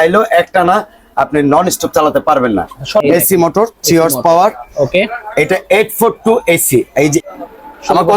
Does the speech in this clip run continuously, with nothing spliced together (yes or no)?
no